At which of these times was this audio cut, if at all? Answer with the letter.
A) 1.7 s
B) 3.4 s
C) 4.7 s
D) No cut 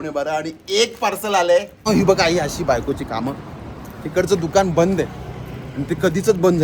A